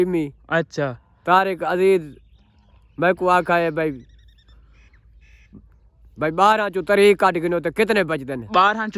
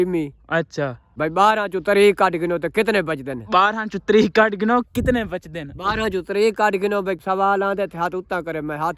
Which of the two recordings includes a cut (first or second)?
second